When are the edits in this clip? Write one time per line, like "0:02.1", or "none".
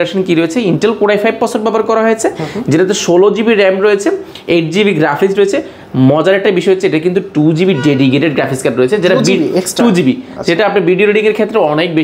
none